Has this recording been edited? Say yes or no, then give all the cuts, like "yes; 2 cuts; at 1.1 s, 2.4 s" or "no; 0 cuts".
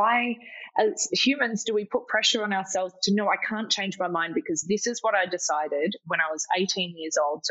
no; 0 cuts